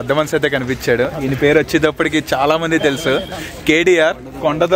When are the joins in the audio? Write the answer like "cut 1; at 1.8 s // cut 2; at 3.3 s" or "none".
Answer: none